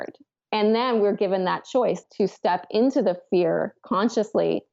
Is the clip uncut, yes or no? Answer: no